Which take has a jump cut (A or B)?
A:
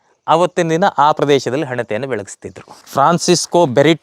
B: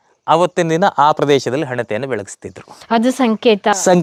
A